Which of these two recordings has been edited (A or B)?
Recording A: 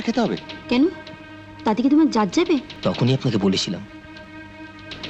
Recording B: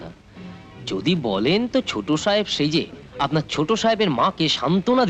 A